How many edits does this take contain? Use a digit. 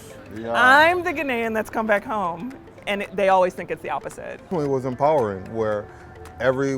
1